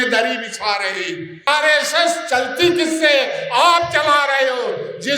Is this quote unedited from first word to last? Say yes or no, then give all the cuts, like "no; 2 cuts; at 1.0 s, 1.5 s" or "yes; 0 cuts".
no; 1 cut; at 1.5 s